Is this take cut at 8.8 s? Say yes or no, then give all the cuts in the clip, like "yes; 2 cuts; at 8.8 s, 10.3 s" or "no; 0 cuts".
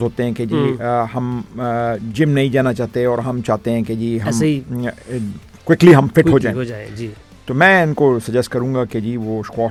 no; 0 cuts